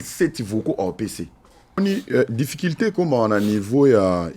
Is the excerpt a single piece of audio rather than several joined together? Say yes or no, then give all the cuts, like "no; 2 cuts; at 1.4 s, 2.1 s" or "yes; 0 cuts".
no; 1 cut; at 1.8 s